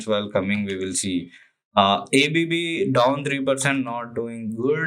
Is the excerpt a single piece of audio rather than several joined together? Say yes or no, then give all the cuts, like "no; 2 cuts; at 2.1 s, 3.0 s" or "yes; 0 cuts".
yes; 0 cuts